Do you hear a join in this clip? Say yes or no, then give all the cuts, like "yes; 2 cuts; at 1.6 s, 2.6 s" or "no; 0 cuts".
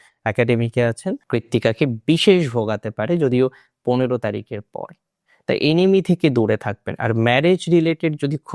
yes; 1 cut; at 1.2 s